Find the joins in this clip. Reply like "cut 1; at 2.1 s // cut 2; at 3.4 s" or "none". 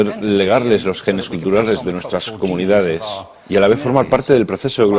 cut 1; at 4.1 s

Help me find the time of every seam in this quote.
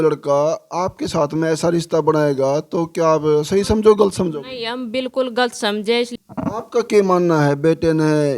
cut 1; at 6.1 s

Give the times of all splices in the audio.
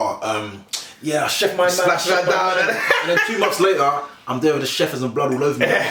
none

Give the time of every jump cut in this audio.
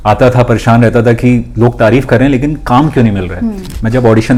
none

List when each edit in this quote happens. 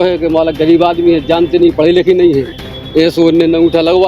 none

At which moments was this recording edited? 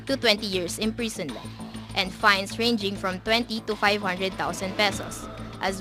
none

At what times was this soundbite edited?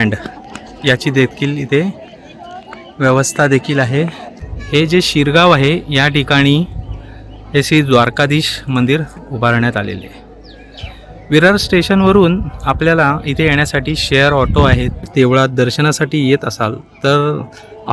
cut 1; at 4.2 s // cut 2; at 15.1 s

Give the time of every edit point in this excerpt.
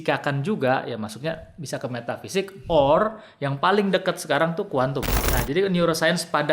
cut 1; at 5.2 s

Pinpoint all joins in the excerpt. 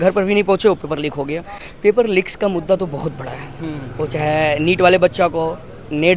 none

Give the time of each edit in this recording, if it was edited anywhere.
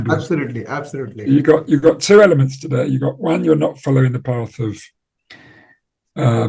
none

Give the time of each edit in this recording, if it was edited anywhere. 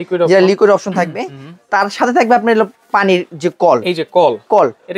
none

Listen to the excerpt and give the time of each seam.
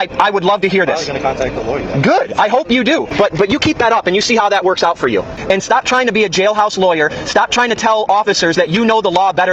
cut 1; at 3.1 s // cut 2; at 5.3 s

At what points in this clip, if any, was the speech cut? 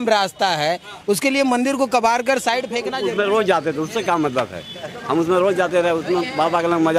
cut 1; at 3.0 s

